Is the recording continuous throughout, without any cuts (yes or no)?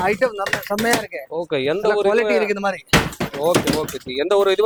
yes